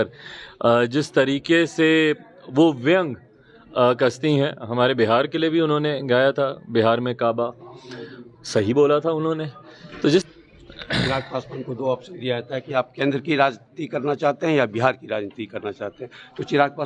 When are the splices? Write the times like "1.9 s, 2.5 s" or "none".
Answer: 10.2 s